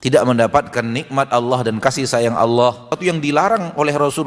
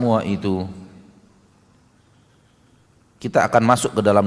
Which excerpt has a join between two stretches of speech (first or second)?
first